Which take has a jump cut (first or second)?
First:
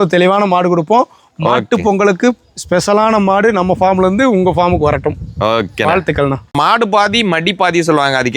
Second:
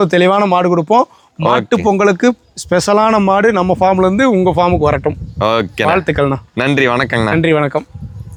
first